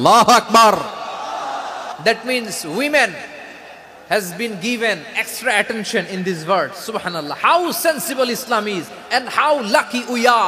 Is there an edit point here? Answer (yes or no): yes